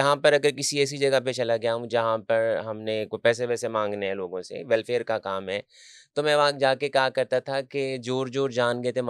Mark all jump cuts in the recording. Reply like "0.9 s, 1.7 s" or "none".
none